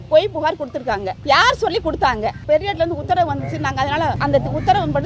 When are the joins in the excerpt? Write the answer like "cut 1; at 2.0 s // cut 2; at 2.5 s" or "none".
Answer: cut 1; at 1.1 s // cut 2; at 2.4 s // cut 3; at 4.2 s